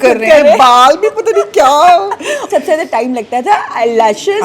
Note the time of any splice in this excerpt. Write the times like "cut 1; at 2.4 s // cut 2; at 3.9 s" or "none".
cut 1; at 2.5 s